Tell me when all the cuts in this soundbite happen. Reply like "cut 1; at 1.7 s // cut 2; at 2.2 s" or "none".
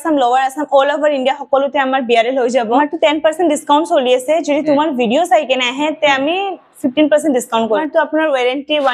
cut 1; at 2.8 s // cut 2; at 7.8 s

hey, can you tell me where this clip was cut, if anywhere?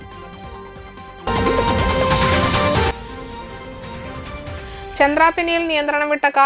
cut 1; at 1.3 s

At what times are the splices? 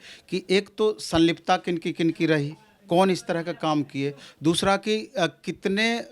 none

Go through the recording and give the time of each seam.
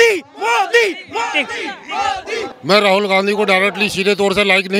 cut 1; at 2.5 s

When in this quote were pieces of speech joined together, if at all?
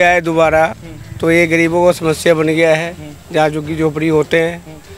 none

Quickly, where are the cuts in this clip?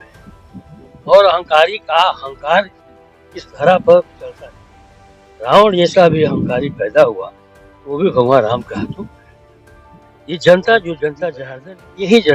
cut 1; at 11.3 s

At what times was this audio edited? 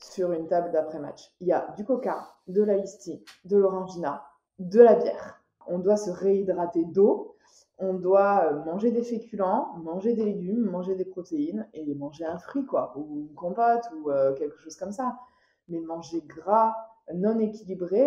cut 1; at 5.6 s

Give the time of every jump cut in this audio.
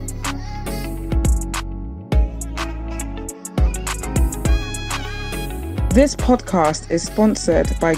none

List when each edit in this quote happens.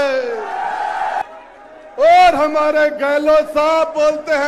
cut 1; at 1.2 s

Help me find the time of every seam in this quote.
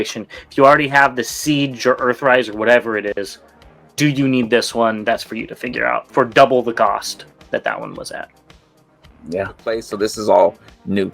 cut 1; at 9.9 s

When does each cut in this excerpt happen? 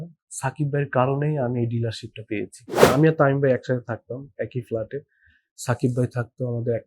cut 1; at 2.8 s

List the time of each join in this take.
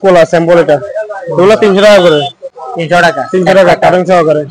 none

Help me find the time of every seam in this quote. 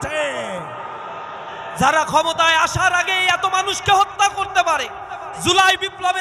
cut 1; at 1.6 s

